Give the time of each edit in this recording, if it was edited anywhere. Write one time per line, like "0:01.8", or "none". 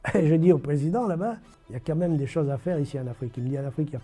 none